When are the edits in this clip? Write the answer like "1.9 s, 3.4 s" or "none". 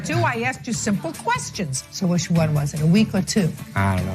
1.8 s